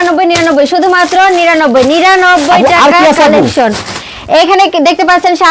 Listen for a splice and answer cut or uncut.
uncut